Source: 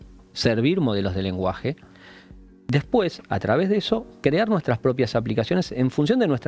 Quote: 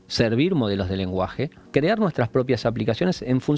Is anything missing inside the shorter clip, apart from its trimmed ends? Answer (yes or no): yes